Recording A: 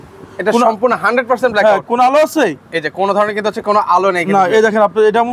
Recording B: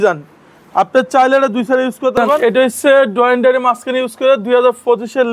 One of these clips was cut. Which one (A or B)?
B